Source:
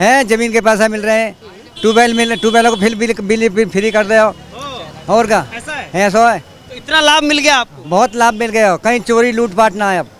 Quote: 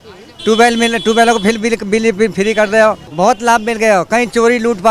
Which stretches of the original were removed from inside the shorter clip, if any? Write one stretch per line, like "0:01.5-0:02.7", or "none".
0:04.4-0:07.8

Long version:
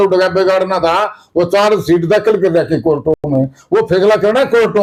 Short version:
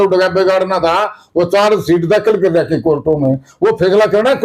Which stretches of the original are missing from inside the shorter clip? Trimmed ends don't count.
0:03.2-0:03.3

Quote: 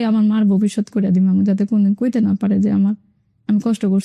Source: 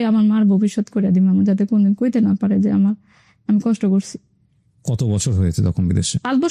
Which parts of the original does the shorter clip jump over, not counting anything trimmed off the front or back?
none

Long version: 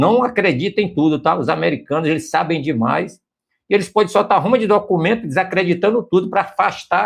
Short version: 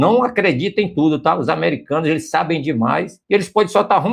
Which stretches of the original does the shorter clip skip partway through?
0:03.2-0:03.6

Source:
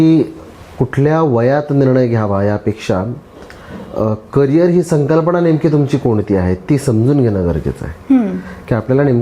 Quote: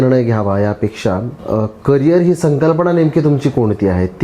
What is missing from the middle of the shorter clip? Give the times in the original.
0:03.2-0:03.8

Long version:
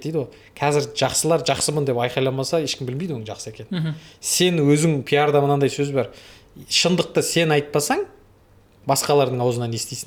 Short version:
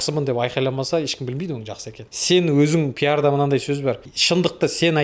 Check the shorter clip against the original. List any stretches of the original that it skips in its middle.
0:03.6-0:04.1
0:06.2-0:06.6

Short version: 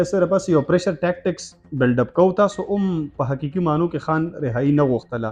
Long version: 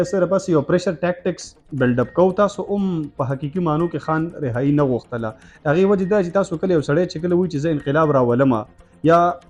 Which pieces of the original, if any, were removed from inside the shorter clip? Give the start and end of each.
none

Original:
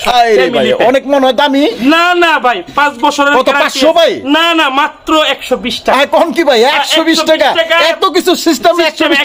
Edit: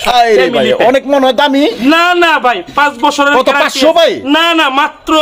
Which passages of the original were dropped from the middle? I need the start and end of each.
none

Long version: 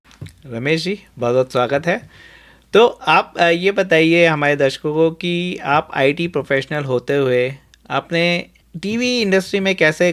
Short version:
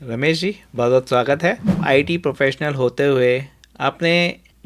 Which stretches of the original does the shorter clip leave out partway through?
0:02.2-0:05.9

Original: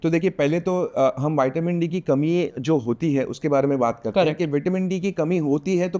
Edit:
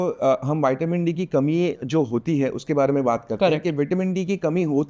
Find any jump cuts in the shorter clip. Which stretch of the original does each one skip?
none

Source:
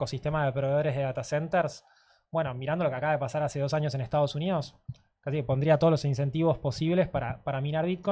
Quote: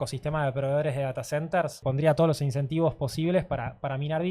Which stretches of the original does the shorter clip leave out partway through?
0:01.8-0:05.4

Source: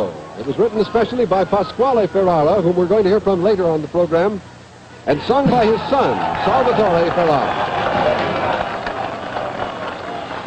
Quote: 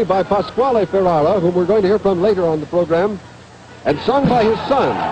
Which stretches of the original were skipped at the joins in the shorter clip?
none

